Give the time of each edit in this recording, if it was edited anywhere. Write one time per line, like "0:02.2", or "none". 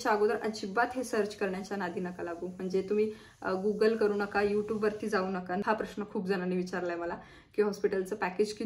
0:05.6